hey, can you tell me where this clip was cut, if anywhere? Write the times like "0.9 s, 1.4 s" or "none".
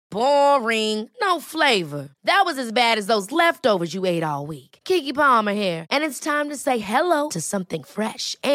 none